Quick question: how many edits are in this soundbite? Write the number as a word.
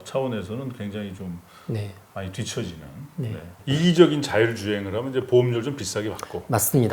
one